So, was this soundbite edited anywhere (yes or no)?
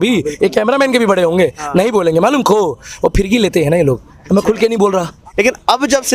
yes